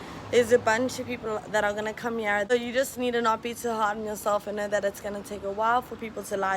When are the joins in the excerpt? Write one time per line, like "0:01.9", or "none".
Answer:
0:02.5